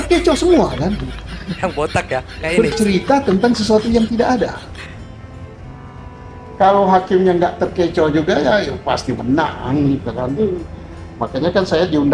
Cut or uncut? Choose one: uncut